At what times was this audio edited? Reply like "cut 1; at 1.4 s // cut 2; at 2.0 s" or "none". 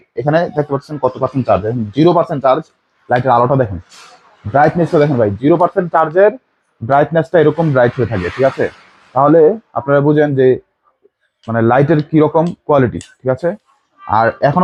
none